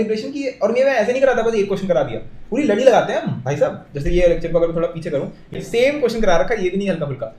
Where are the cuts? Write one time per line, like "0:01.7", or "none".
0:05.6